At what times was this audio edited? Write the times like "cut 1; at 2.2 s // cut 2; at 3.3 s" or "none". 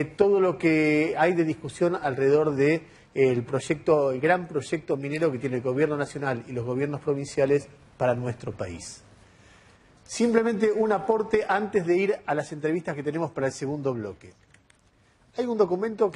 cut 1; at 10.5 s